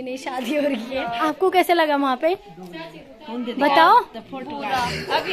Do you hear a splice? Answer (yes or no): yes